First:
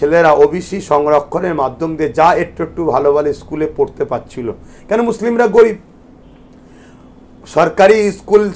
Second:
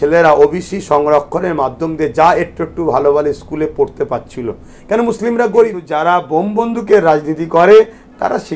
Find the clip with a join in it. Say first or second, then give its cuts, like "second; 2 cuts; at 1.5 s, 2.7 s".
second; 1 cut; at 5.9 s